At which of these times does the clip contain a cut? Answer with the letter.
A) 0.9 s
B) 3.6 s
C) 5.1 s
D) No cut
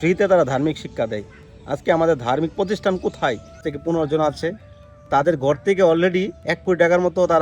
B